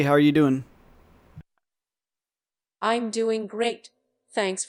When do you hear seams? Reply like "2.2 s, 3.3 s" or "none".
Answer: none